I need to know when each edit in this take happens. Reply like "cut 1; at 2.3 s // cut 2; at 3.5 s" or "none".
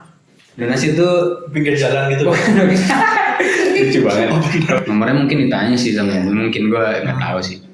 cut 1; at 4.8 s

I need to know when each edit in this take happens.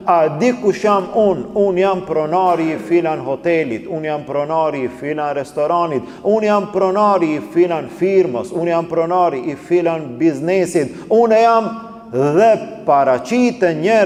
none

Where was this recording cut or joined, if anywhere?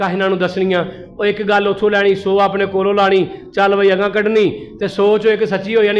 none

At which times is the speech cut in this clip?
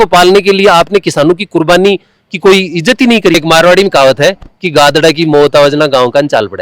cut 1; at 3.4 s

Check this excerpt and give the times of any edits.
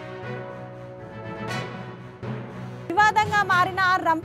cut 1; at 1.4 s

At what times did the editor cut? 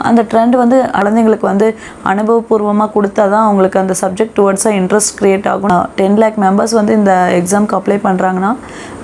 cut 1; at 1.0 s // cut 2; at 5.7 s

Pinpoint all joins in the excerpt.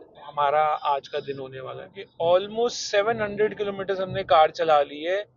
cut 1; at 2.0 s

